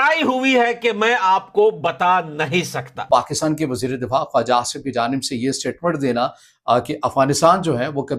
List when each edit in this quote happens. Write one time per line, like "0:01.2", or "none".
0:02.9